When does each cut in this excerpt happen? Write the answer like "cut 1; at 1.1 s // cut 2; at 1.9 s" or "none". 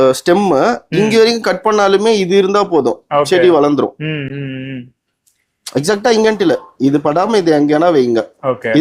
none